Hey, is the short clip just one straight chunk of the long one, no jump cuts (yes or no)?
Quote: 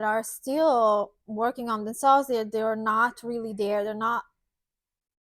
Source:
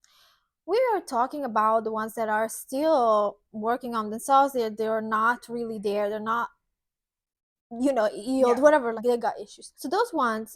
yes